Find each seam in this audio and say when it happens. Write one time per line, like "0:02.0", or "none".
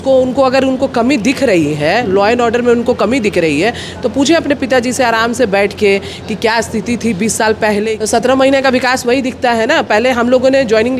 0:07.9